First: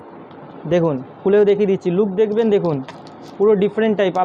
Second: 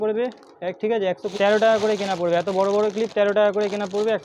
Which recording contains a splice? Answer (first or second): second